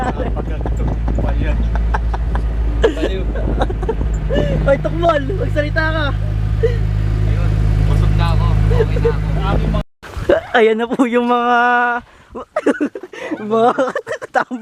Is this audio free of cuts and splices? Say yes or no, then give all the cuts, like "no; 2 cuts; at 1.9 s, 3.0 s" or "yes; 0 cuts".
no; 1 cut; at 9.8 s